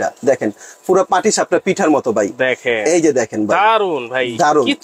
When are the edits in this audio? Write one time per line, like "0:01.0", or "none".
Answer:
none